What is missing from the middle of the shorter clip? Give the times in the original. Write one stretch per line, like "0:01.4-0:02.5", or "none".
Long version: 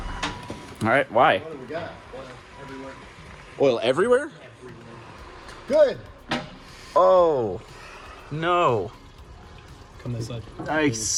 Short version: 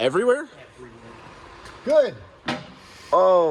none